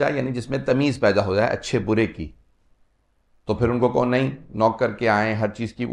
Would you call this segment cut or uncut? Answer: uncut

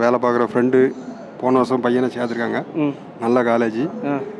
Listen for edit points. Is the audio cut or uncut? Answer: uncut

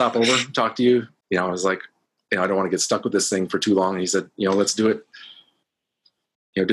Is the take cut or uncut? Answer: cut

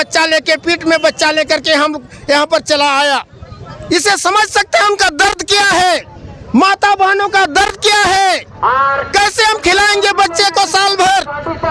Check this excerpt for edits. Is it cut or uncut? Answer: uncut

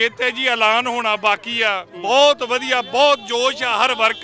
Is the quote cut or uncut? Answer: uncut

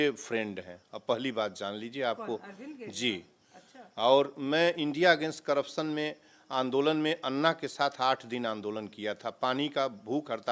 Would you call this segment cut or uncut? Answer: uncut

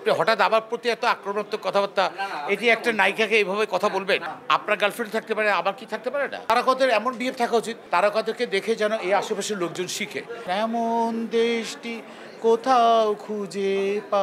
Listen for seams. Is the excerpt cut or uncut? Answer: cut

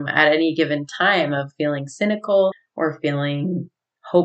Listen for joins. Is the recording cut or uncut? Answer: cut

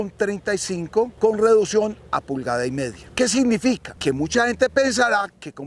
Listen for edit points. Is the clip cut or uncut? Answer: cut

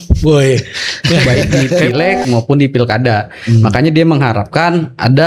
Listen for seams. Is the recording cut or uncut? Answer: cut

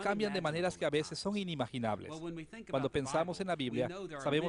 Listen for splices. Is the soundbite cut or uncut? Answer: uncut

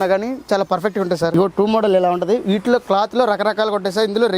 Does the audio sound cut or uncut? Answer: cut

